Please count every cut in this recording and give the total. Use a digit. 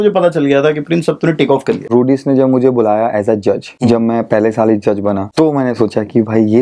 3